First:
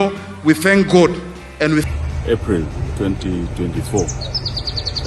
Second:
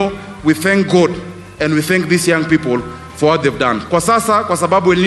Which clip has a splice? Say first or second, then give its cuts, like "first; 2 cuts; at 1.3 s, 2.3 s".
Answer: first; 1 cut; at 1.8 s